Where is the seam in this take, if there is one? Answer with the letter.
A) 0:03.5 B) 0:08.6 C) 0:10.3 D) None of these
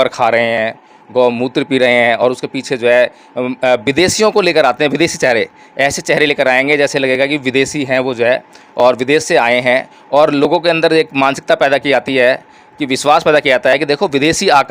D